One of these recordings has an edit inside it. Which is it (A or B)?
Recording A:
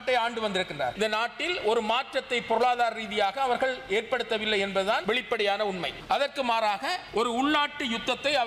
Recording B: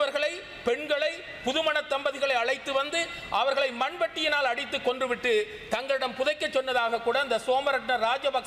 A